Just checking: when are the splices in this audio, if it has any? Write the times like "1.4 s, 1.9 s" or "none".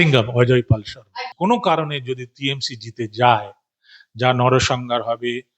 1.2 s